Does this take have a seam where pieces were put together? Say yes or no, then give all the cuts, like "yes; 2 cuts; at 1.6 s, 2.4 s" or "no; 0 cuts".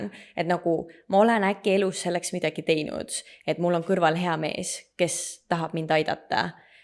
no; 0 cuts